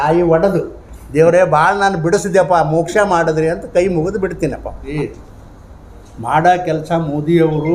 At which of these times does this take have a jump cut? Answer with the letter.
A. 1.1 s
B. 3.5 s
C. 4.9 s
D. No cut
C